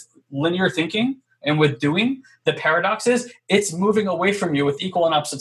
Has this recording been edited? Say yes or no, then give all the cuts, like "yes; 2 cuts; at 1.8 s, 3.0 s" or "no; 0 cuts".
no; 0 cuts